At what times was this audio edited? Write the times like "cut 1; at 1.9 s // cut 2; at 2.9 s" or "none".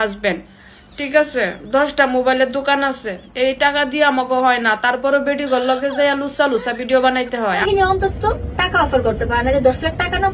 cut 1; at 7.6 s